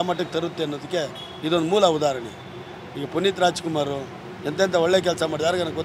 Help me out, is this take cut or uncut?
uncut